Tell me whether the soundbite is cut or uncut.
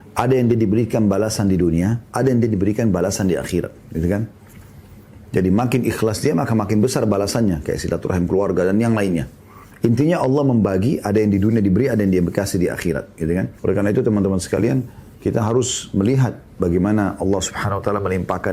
cut